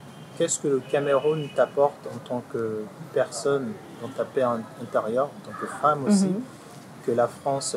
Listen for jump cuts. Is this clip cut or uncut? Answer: uncut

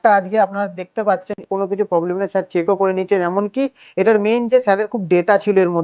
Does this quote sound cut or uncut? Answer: cut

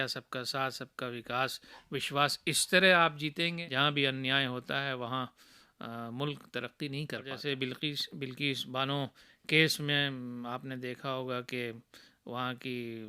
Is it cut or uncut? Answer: cut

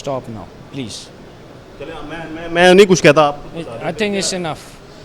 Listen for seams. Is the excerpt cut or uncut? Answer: uncut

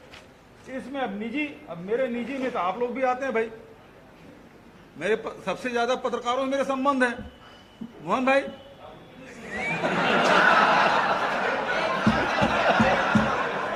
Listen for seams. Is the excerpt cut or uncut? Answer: uncut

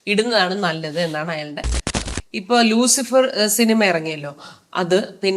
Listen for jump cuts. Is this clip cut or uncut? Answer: cut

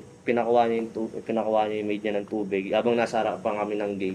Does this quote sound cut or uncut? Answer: uncut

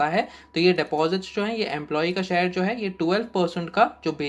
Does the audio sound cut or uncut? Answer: uncut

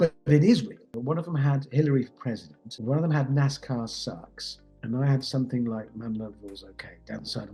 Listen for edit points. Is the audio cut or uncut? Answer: cut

